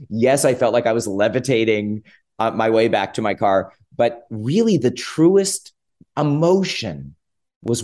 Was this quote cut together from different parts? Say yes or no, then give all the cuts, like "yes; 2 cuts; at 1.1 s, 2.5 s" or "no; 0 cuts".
no; 0 cuts